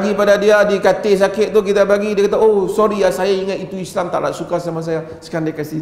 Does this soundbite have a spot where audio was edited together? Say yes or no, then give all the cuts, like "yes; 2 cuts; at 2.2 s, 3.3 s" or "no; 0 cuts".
no; 0 cuts